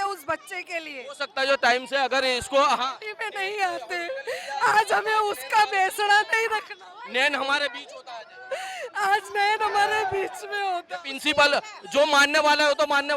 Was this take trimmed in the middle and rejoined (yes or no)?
no